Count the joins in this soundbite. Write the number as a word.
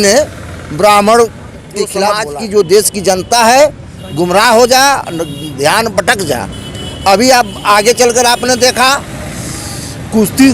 one